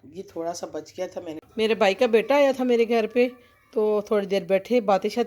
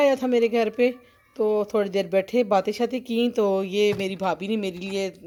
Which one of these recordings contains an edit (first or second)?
first